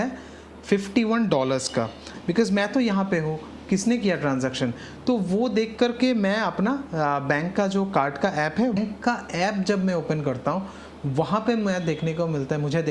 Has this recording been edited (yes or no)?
yes